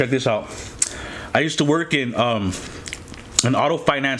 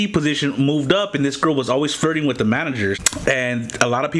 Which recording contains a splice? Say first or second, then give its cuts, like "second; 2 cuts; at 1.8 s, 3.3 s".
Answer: second; 1 cut; at 3.1 s